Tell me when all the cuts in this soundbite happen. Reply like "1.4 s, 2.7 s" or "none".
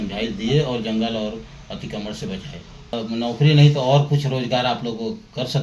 2.9 s